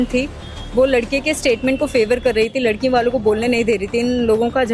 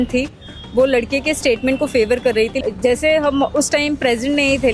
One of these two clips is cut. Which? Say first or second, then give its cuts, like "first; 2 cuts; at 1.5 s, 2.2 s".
second; 1 cut; at 2.6 s